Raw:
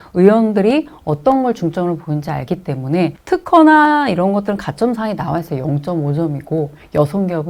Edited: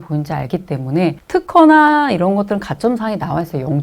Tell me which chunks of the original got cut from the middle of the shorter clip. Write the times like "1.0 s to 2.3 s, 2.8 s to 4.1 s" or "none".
none